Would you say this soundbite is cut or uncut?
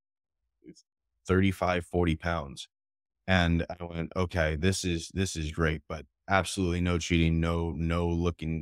uncut